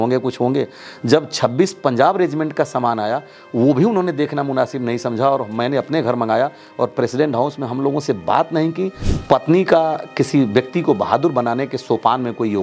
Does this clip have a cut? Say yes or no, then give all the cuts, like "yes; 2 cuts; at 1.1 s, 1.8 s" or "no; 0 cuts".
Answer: yes; 1 cut; at 9.0 s